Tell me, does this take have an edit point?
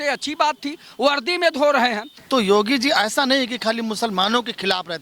yes; 1 cut; at 2.1 s

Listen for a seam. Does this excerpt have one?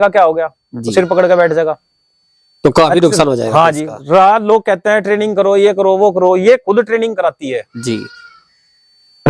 no; 0 cuts

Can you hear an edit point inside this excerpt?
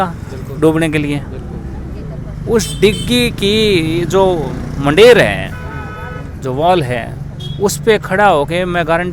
no; 0 cuts

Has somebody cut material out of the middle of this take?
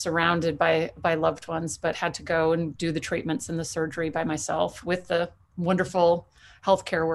no; 0 cuts

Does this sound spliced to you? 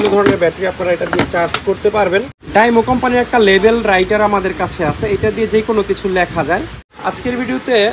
yes; 2 cuts; at 2.4 s, 6.9 s

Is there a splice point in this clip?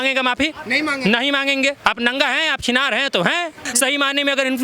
yes; 1 cut; at 3.7 s

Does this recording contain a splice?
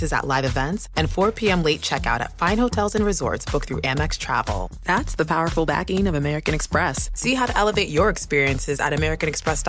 no; 0 cuts

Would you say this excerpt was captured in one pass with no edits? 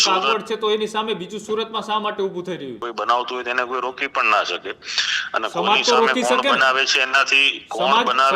no; 1 cut; at 2.8 s

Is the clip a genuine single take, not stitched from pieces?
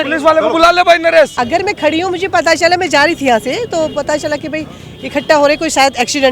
no; 1 cut; at 1.4 s

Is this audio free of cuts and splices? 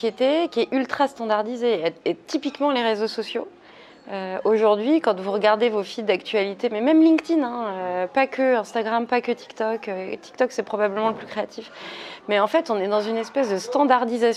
yes; 0 cuts

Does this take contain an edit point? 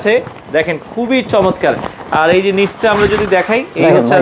no; 0 cuts

